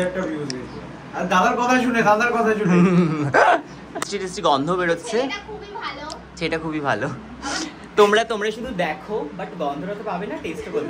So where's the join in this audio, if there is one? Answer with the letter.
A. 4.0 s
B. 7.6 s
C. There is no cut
A